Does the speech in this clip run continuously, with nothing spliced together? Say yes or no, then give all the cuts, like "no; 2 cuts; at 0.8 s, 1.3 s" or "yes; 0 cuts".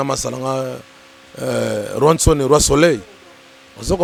yes; 0 cuts